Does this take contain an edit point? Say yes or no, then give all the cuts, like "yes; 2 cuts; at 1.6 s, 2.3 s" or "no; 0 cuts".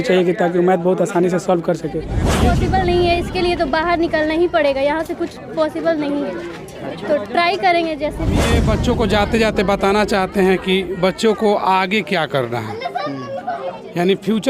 yes; 2 cuts; at 2.2 s, 8.6 s